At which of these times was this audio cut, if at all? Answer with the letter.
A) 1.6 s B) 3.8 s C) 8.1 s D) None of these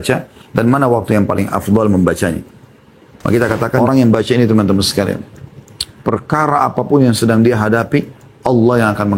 B